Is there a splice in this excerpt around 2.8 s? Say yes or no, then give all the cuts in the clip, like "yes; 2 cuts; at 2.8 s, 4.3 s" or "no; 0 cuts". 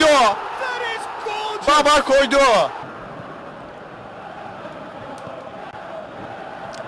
yes; 1 cut; at 2.8 s